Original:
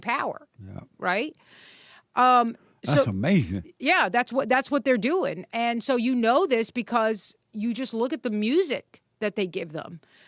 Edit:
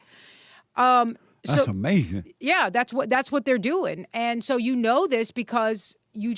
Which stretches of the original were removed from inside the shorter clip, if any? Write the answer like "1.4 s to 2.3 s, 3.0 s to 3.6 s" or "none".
none